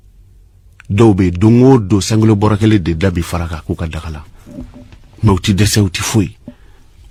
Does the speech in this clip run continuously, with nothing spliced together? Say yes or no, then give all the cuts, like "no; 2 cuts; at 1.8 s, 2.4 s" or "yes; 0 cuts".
yes; 0 cuts